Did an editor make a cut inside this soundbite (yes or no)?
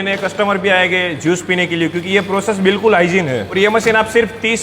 yes